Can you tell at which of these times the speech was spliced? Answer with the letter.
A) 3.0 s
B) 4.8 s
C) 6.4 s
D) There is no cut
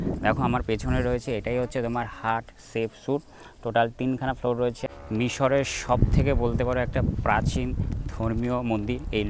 B